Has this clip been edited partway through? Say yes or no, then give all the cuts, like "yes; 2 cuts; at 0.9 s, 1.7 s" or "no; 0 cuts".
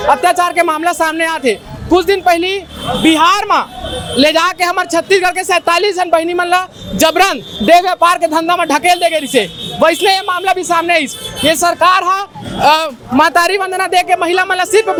no; 0 cuts